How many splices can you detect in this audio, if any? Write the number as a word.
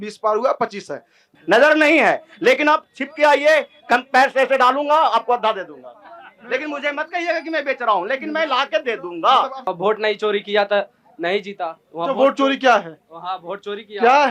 two